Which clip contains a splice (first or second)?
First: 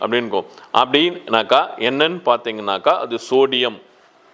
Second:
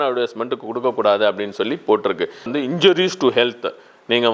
second